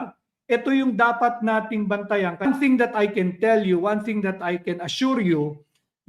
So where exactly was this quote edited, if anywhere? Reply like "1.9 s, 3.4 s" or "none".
2.5 s